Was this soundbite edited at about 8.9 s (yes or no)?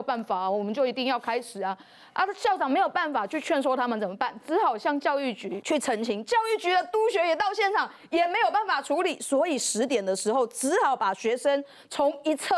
no